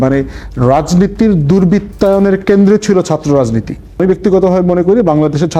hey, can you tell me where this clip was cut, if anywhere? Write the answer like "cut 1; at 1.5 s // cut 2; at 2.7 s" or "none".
cut 1; at 3.9 s